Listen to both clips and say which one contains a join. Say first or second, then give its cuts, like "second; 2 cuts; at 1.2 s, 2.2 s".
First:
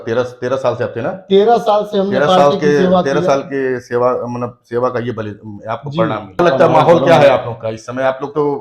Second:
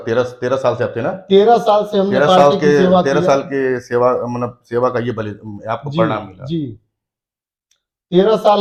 first; 1 cut; at 6.4 s